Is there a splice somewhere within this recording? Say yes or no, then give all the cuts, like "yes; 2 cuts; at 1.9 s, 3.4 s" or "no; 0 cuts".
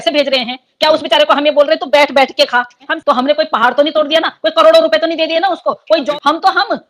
yes; 2 cuts; at 2.9 s, 6.1 s